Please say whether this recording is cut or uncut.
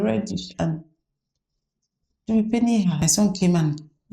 cut